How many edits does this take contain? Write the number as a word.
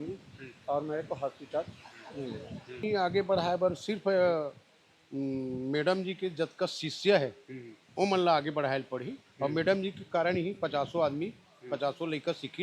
one